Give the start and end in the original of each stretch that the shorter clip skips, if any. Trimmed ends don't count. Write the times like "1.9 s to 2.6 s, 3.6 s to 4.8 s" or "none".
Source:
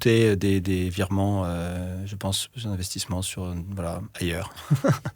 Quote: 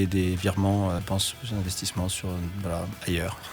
1.5 s to 2.1 s